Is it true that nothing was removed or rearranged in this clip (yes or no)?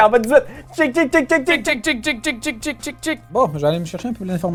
yes